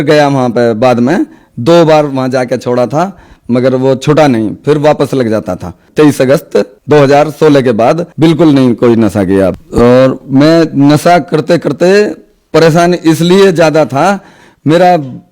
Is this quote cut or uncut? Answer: uncut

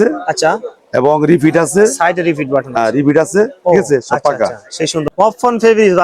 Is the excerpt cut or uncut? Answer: cut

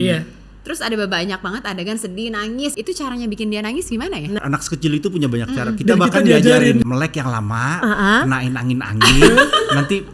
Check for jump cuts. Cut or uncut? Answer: cut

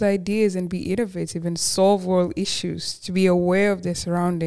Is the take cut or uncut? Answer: uncut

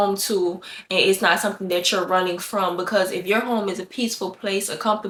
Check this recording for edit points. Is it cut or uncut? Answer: uncut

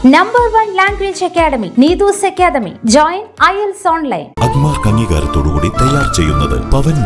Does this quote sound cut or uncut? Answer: uncut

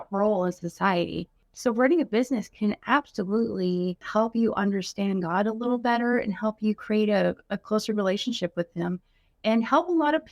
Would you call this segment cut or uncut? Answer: cut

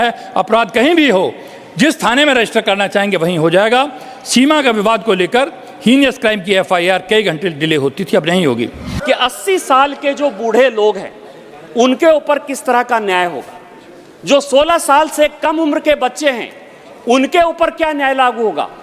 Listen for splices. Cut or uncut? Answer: cut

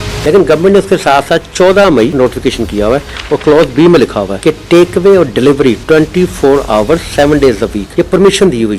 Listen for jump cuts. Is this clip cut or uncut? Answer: cut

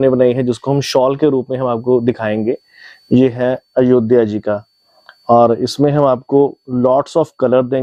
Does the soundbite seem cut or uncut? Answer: uncut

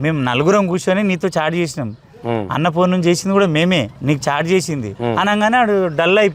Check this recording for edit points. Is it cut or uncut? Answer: cut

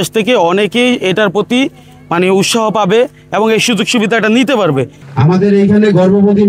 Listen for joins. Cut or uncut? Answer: cut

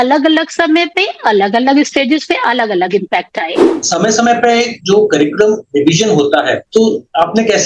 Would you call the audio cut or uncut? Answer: cut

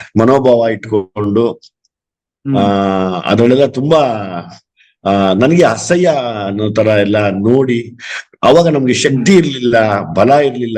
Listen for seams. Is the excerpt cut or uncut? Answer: uncut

